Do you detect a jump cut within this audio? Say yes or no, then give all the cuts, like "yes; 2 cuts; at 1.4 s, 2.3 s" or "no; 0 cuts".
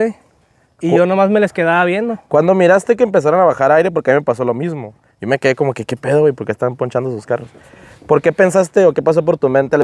no; 0 cuts